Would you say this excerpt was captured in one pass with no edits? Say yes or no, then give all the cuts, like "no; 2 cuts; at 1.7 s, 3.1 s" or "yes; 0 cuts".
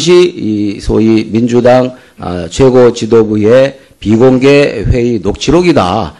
no; 1 cut; at 2.4 s